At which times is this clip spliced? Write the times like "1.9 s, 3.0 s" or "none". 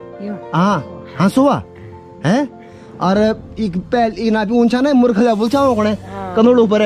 none